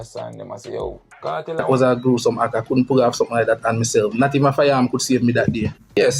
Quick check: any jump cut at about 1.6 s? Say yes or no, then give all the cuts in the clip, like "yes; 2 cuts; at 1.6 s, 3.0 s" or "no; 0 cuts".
yes; 1 cut; at 1.6 s